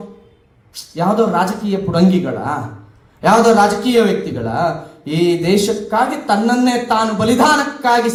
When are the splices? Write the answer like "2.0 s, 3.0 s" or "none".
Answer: none